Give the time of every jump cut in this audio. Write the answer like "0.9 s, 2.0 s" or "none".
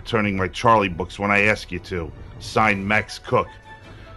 none